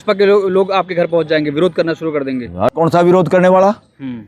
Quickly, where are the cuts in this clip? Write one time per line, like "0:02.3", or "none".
0:02.6